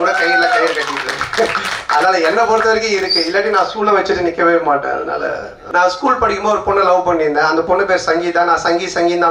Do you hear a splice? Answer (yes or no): yes